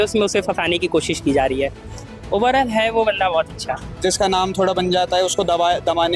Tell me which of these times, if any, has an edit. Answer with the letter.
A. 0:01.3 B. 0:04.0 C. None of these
B